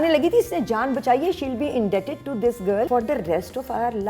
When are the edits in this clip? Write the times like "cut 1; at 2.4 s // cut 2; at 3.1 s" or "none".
cut 1; at 2.9 s